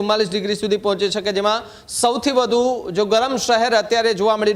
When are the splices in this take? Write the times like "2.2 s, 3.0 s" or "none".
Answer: none